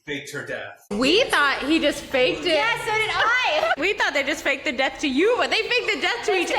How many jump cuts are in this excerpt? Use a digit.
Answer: 2